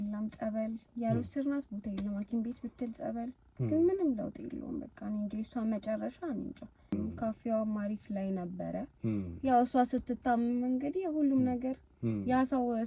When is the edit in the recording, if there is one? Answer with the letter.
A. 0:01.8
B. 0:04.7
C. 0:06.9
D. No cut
C